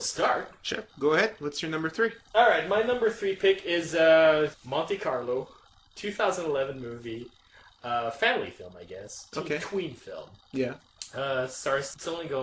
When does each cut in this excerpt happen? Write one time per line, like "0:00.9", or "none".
0:10.7